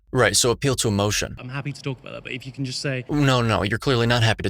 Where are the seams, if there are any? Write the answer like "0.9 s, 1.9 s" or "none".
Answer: 1.4 s, 3.1 s